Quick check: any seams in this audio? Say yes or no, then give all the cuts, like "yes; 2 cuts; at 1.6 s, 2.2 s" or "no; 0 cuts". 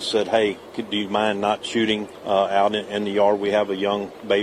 yes; 1 cut; at 2.1 s